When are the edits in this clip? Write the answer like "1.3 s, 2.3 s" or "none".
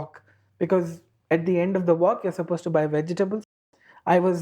3.4 s